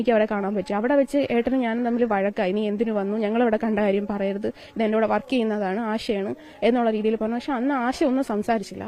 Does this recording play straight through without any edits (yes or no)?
yes